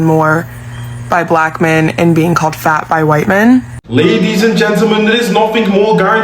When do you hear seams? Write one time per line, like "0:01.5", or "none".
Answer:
0:03.8